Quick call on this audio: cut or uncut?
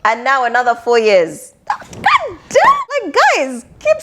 cut